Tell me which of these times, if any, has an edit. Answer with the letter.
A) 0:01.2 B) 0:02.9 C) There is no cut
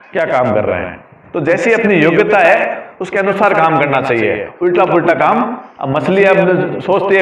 A